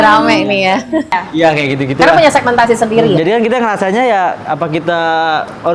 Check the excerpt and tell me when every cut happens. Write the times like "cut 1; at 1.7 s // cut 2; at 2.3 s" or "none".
cut 1; at 1.1 s

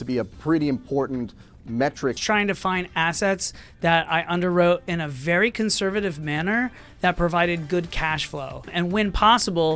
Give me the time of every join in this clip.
cut 1; at 2.2 s // cut 2; at 8.7 s

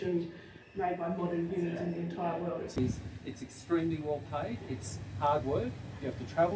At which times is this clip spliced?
cut 1; at 2.8 s

